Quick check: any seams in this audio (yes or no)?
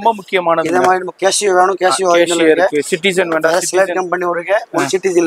no